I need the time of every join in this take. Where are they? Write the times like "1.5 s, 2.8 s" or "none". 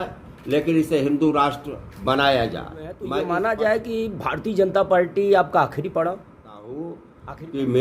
2.8 s, 6.2 s

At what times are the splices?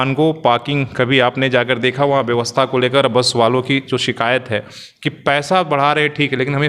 none

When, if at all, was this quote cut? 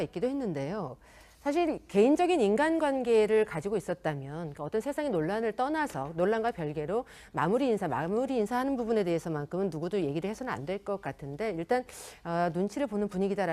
4.3 s

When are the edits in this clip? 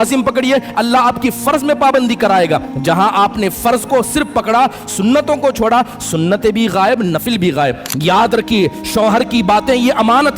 7.9 s

